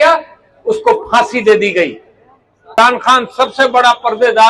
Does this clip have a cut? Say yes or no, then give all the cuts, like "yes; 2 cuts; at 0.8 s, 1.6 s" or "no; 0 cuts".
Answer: yes; 1 cut; at 2.8 s